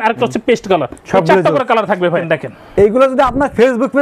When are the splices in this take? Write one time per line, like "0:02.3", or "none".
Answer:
0:02.2